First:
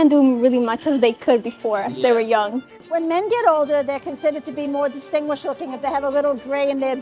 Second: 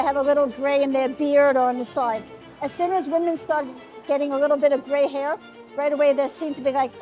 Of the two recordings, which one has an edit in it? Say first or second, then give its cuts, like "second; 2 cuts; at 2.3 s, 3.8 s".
first; 1 cut; at 2.7 s